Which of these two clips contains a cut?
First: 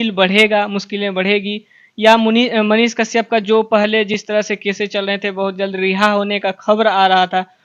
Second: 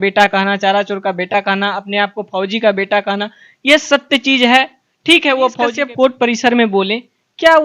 second; 1 cut; at 5.6 s

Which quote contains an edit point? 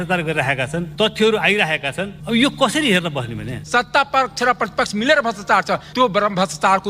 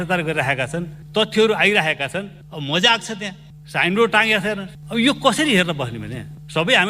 first; 3 cuts; at 0.9 s, 2.1 s, 3.5 s

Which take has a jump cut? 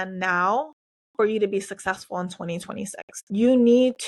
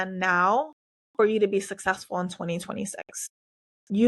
first; 1 cut; at 3.1 s

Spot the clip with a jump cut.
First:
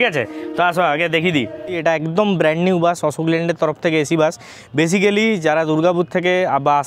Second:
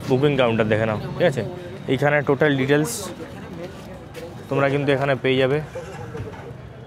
first; 1 cut; at 1.8 s

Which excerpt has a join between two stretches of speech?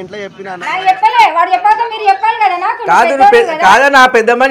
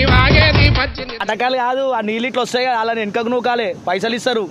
second; 1 cut; at 1.2 s

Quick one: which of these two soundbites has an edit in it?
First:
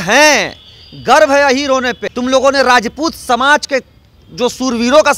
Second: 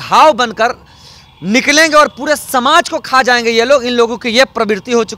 first; 1 cut; at 2.0 s

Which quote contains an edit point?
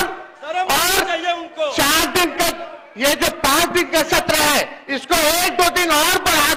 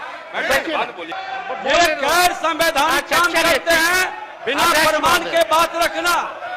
second; 1 cut; at 1.2 s

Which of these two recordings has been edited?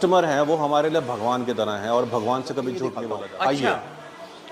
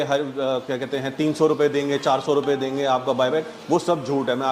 first; 1 cut; at 3.0 s

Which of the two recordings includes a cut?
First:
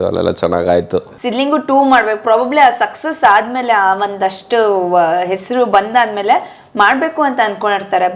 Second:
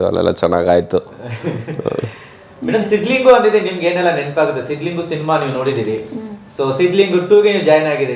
first; 1 cut; at 1.1 s

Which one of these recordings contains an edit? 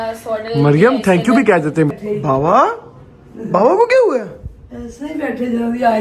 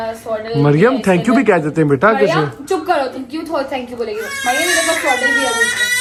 first; 1 cut; at 1.9 s

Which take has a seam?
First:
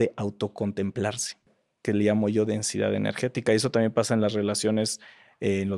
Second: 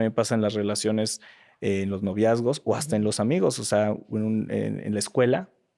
first; 1 cut; at 1.6 s

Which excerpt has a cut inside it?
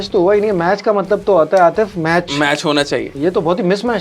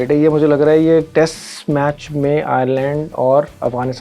first; 1 cut; at 3.1 s

